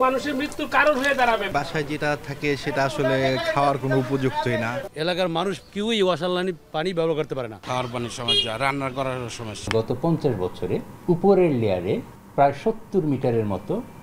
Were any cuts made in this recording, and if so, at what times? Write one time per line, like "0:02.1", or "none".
0:01.5
0:04.9
0:07.6
0:09.7
0:10.9
0:12.2